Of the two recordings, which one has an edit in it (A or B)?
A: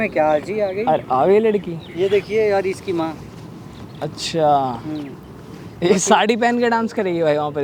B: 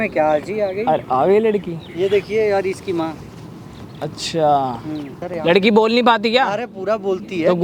B